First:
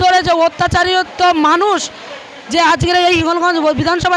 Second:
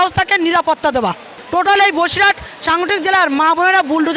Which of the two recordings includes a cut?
second; 1 cut; at 1.3 s

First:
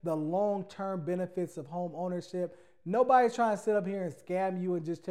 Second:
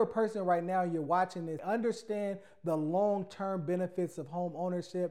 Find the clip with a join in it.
second; 1 cut; at 1.6 s

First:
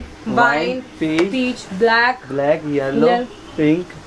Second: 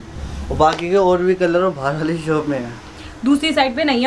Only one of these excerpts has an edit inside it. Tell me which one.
second; 1 cut; at 2.9 s

